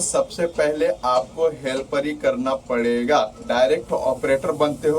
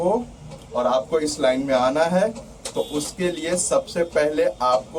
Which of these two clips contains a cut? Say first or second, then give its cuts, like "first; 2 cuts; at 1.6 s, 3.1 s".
first; 1 cut; at 3.4 s